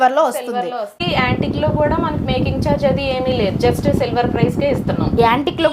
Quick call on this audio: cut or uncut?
cut